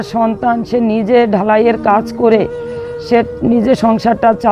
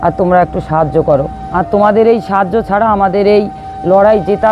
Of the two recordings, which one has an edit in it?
second; 1 cut; at 1.5 s

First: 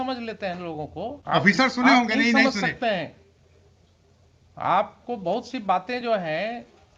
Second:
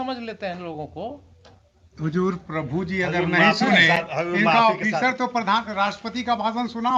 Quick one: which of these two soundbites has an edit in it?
first; 1 cut; at 1.2 s

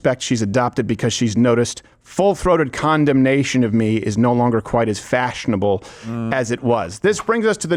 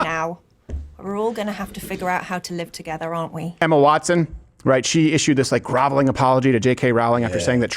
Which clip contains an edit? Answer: second; 1 cut; at 3.5 s

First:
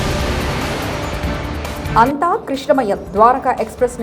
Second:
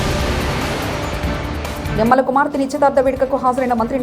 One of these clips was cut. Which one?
first; 1 cut; at 1.9 s

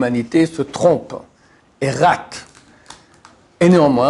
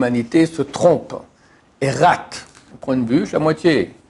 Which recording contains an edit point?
second; 1 cut; at 2.7 s

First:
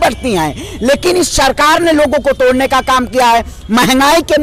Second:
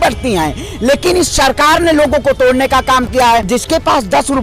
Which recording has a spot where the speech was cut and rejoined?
second; 1 cut; at 3.5 s

